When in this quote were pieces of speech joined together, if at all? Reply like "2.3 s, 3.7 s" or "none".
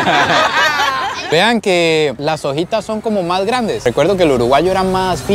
none